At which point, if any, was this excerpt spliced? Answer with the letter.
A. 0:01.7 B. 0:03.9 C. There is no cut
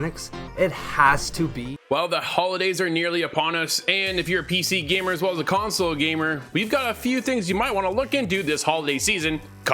A